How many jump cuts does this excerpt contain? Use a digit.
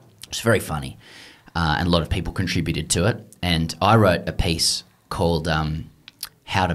0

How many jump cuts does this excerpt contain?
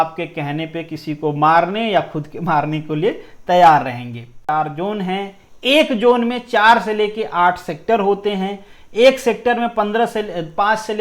1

